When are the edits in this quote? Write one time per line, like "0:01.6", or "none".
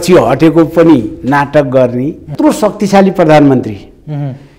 0:02.2